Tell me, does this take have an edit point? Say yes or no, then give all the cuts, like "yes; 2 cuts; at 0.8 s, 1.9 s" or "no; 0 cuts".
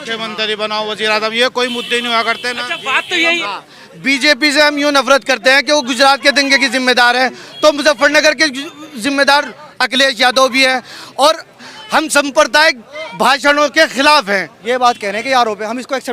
yes; 2 cuts; at 3.4 s, 14.5 s